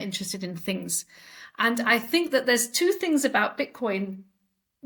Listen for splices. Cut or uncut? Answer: uncut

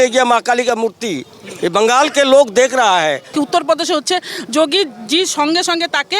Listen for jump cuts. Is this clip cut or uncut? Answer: cut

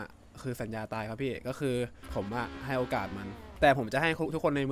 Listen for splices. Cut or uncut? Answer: cut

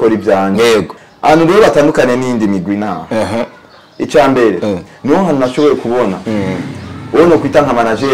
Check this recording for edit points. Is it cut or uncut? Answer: cut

